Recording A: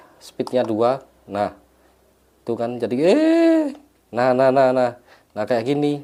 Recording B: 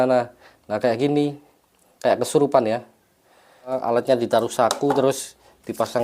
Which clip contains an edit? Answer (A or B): B